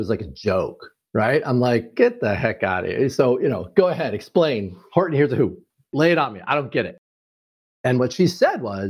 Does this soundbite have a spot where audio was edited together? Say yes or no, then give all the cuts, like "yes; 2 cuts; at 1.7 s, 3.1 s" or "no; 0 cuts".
yes; 1 cut; at 5.9 s